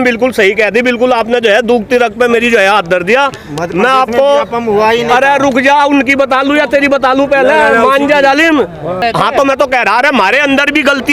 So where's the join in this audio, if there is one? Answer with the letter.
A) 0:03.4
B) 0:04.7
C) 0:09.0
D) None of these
C